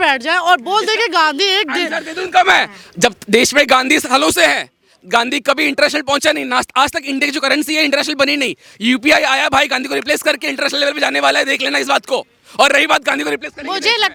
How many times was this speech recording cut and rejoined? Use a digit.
0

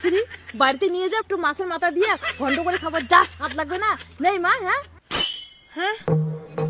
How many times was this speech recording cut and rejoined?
0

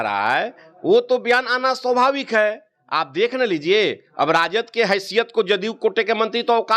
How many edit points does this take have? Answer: 0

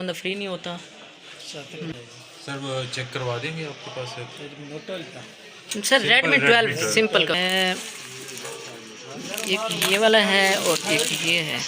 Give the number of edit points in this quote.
2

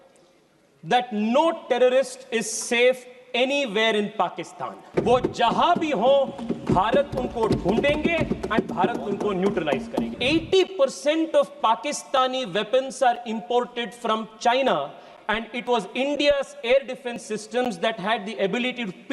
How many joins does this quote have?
2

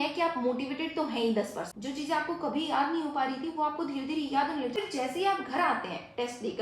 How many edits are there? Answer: 2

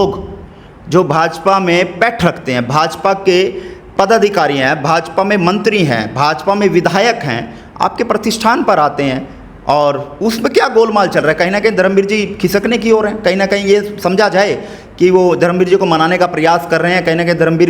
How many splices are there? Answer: 0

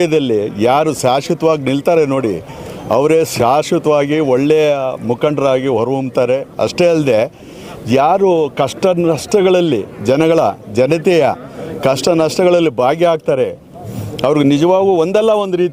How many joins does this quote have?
0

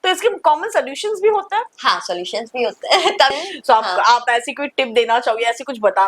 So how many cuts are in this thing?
1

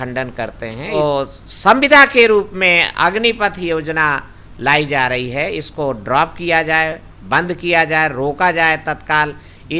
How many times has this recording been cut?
1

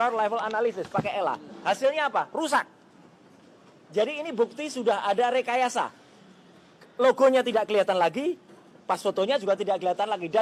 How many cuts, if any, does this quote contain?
0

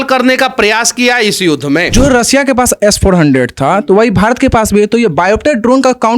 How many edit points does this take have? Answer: 1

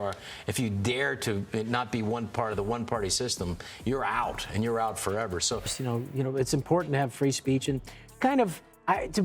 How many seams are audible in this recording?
1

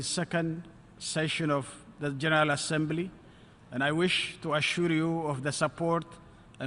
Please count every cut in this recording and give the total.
1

